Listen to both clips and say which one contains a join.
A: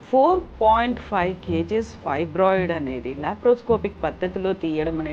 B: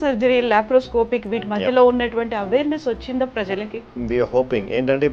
B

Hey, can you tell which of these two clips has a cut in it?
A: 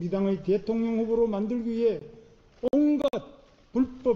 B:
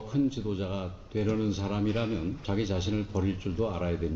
B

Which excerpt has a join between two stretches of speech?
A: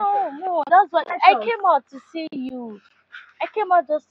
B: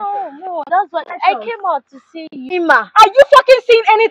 B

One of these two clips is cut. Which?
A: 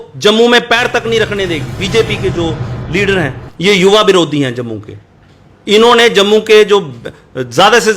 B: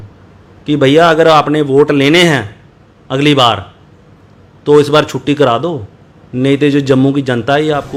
A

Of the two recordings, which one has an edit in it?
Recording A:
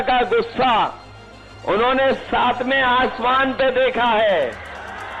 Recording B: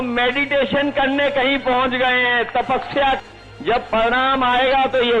B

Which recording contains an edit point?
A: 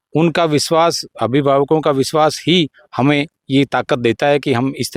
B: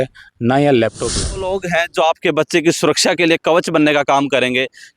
B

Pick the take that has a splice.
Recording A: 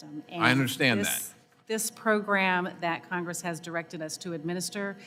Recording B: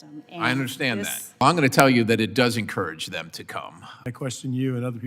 B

